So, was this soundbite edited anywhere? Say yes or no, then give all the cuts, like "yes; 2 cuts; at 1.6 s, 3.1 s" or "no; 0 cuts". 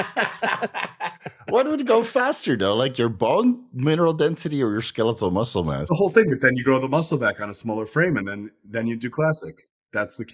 no; 0 cuts